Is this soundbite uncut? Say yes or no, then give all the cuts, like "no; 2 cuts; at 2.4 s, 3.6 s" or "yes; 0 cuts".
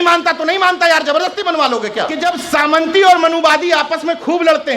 no; 1 cut; at 2.2 s